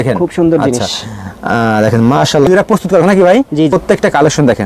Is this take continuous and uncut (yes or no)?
no